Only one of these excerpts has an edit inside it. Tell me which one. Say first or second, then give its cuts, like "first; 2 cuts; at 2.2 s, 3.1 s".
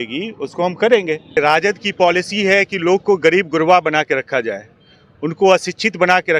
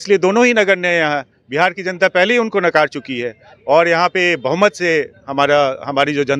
first; 1 cut; at 1.4 s